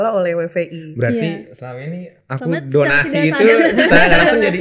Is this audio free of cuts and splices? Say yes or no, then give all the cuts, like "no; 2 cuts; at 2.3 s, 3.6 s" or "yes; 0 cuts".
yes; 0 cuts